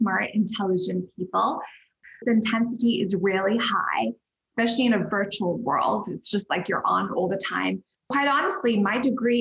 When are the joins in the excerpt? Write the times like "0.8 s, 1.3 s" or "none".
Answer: 2.1 s, 8.1 s